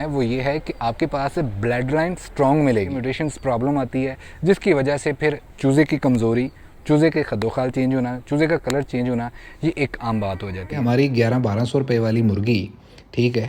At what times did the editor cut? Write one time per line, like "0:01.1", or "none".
0:03.0
0:10.8